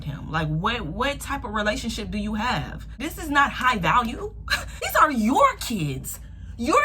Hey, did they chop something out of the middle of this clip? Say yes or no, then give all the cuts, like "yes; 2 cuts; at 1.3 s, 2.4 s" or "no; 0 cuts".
yes; 2 cuts; at 3.0 s, 4.9 s